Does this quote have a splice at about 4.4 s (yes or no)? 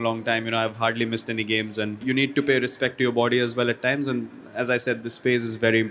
no